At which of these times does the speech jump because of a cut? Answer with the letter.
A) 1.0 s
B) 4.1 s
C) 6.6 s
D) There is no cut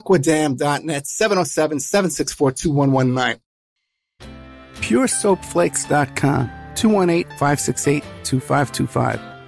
B